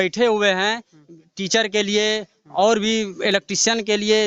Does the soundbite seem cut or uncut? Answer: uncut